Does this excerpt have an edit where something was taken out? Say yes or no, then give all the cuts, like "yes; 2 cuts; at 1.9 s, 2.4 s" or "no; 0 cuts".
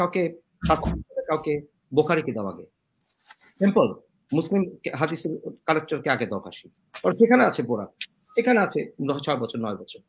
no; 0 cuts